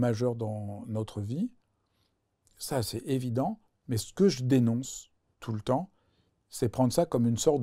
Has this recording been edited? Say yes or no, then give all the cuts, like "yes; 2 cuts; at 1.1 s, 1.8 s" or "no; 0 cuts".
no; 0 cuts